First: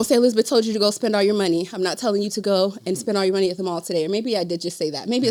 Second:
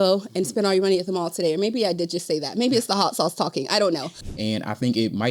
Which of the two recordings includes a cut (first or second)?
second